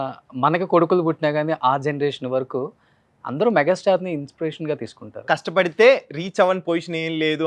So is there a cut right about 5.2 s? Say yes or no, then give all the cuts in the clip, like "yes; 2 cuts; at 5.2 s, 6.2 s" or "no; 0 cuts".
yes; 1 cut; at 5.2 s